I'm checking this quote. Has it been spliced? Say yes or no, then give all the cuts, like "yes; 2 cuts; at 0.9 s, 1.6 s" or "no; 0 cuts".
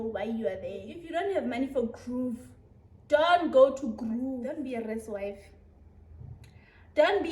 yes; 2 cuts; at 1.0 s, 4.5 s